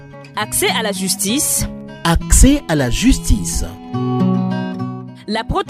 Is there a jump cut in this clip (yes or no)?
no